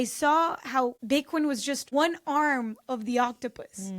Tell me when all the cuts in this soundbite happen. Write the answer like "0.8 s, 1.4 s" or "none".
1.0 s, 1.8 s